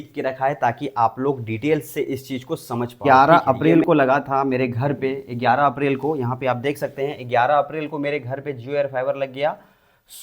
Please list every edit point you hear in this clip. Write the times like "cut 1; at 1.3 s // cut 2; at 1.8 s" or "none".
cut 1; at 3.0 s